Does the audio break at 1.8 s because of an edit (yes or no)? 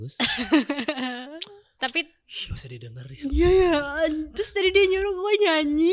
yes